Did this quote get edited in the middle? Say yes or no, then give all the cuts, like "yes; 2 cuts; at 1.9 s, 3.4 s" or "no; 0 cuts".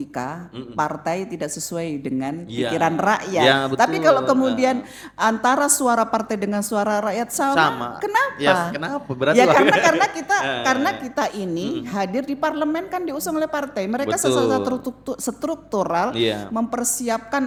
no; 0 cuts